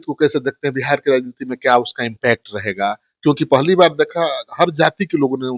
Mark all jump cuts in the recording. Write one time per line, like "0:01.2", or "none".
none